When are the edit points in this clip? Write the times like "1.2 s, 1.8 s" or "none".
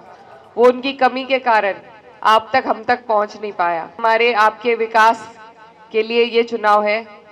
4.0 s